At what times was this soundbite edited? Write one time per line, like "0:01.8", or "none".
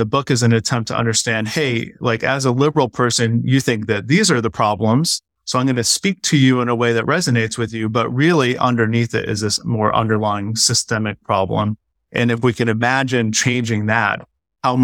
none